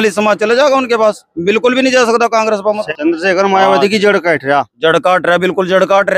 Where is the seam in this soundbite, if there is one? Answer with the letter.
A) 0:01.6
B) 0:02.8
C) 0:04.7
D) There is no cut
B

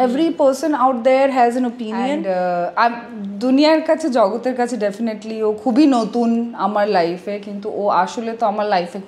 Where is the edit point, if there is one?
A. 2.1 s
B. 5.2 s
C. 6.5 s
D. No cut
A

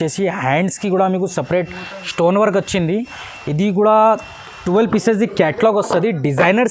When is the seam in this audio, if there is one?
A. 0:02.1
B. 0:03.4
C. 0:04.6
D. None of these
C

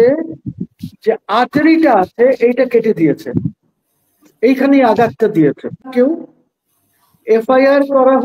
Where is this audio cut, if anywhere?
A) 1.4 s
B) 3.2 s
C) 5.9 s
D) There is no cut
C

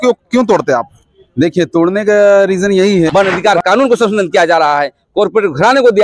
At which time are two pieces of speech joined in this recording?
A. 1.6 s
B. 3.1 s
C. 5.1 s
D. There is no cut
B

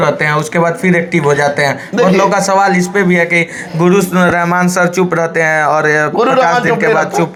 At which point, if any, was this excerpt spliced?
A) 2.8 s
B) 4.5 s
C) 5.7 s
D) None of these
D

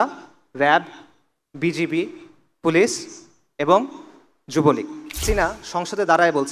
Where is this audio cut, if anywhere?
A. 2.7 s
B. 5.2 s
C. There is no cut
B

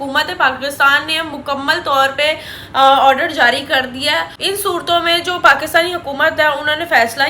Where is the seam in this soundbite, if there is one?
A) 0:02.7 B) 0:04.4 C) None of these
B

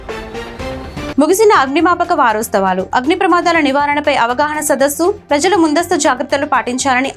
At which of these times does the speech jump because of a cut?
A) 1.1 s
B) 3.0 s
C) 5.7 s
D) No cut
D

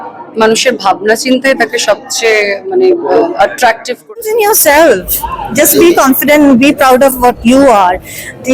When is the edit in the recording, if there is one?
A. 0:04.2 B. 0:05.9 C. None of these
A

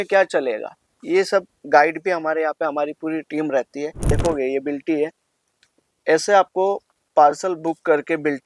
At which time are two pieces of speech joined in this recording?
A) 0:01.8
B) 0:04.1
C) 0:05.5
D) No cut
B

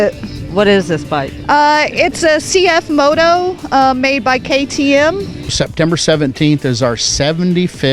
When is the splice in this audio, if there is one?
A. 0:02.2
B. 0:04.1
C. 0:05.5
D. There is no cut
C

